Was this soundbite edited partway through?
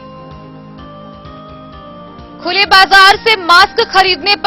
no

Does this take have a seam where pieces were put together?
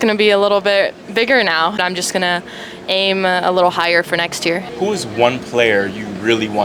yes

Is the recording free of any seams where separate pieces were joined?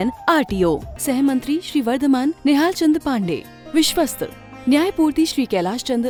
yes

